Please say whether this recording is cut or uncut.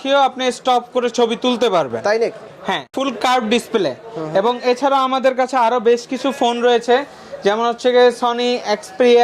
uncut